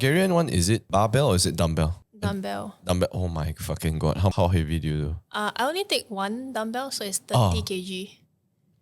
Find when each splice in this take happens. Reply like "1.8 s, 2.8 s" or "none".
0.9 s, 2.0 s, 4.3 s

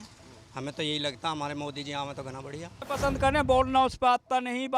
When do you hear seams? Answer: 2.8 s

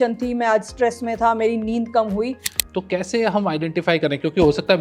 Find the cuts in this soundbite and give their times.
2.5 s

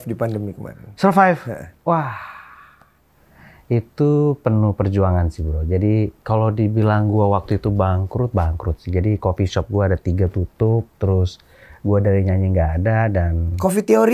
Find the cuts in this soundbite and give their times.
6.2 s

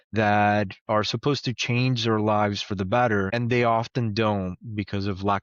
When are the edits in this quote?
3.3 s

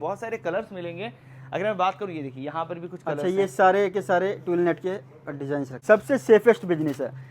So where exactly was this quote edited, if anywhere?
5.7 s

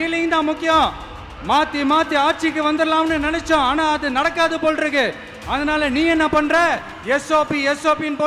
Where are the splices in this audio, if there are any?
none

